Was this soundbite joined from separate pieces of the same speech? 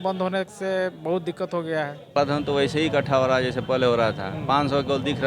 yes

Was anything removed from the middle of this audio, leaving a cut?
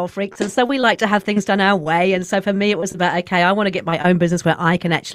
no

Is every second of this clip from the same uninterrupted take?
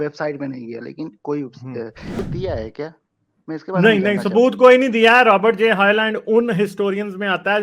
no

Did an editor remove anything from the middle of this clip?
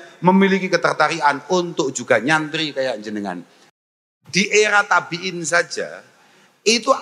yes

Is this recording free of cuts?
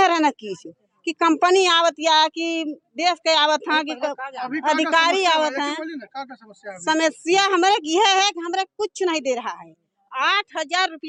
yes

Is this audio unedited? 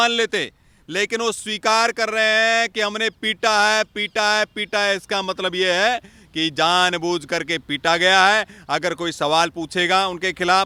yes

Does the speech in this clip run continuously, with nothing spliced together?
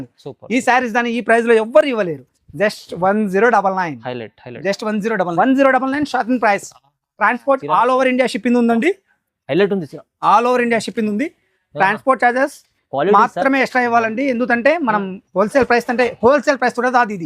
no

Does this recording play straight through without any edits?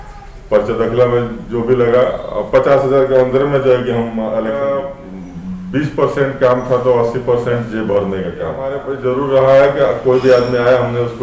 no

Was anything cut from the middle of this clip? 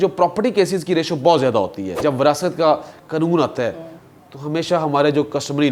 yes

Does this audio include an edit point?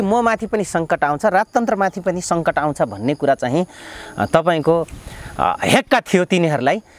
no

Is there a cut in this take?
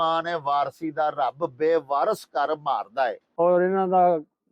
yes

